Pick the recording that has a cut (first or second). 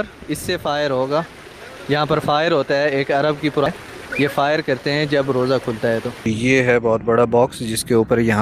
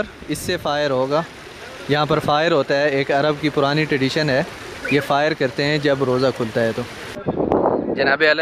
first